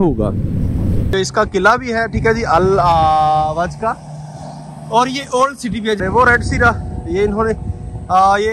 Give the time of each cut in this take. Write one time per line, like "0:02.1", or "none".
0:01.1
0:06.0